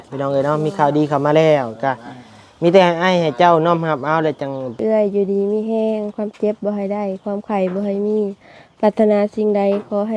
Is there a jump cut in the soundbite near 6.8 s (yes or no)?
no